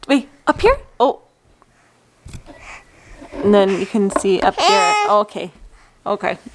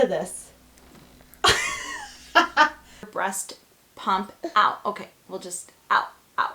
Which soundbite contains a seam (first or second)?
second